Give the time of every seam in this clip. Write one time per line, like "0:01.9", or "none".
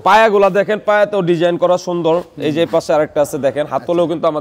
none